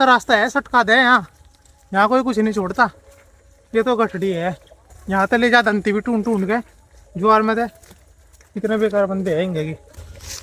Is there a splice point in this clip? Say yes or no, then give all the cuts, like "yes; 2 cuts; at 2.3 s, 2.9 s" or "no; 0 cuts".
no; 0 cuts